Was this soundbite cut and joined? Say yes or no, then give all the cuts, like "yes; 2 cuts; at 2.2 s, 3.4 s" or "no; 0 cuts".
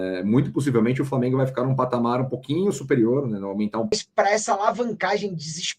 yes; 1 cut; at 3.9 s